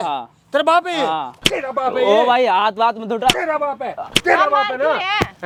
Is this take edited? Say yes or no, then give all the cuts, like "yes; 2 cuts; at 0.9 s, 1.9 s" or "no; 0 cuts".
no; 0 cuts